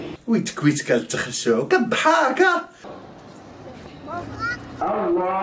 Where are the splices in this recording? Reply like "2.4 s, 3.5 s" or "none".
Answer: 2.8 s

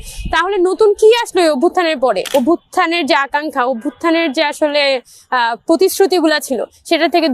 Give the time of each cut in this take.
2.3 s

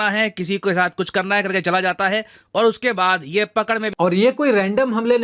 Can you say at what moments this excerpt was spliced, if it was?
3.9 s

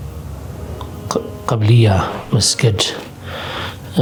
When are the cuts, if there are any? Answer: none

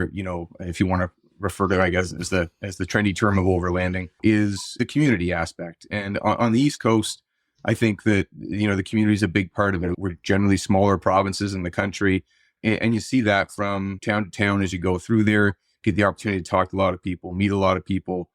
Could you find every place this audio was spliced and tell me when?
4.2 s, 10.0 s, 14.0 s

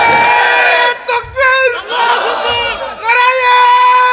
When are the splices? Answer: none

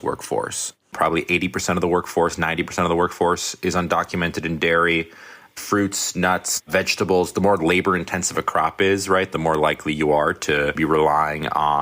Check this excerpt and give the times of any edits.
0.9 s, 6.7 s, 9.3 s, 10.8 s

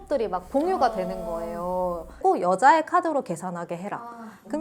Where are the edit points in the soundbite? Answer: 2.1 s

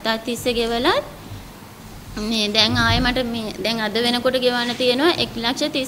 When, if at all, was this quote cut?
none

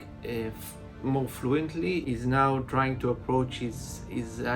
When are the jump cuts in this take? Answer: 2.0 s

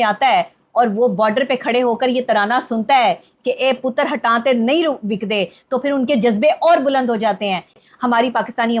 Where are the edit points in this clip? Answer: 7.8 s

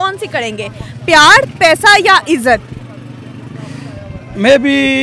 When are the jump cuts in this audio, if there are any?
none

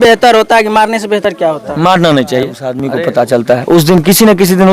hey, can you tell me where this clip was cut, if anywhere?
2.8 s

